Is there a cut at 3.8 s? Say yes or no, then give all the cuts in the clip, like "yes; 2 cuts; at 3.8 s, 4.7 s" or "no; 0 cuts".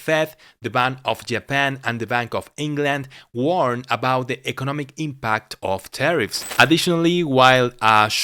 no; 1 cut; at 6.4 s